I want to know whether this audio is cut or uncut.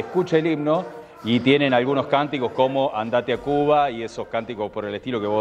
uncut